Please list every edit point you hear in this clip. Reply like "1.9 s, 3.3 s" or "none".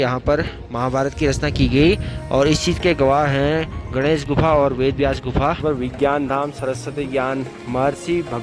5.6 s